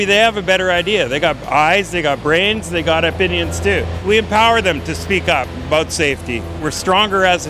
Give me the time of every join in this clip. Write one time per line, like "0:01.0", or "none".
0:06.5

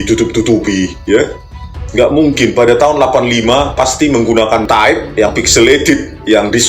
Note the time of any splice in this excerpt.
0:04.6

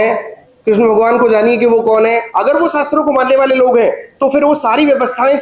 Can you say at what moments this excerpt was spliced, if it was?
0:02.3

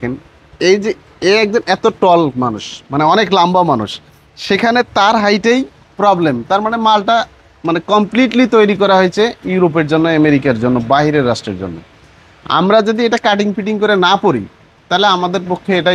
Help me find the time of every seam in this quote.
none

